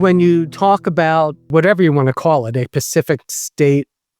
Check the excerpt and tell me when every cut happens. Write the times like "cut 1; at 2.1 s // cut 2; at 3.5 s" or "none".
cut 1; at 1.4 s